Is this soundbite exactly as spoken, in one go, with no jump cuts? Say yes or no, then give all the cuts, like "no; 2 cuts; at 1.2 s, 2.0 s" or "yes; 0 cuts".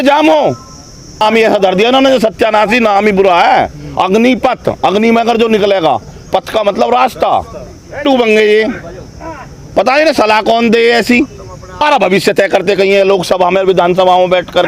no; 3 cuts; at 1.2 s, 8.0 s, 11.8 s